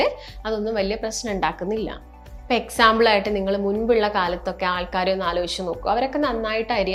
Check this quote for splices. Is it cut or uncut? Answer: uncut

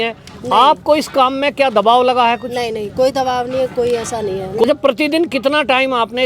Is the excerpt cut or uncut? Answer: cut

